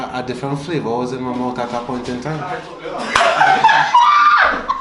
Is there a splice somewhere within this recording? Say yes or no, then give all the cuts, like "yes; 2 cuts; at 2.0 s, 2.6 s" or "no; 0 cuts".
no; 0 cuts